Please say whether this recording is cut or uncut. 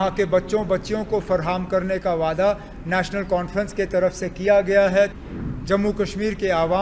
cut